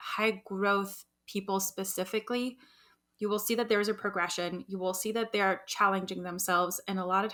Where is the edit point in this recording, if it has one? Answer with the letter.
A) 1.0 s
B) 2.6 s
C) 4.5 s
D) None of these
D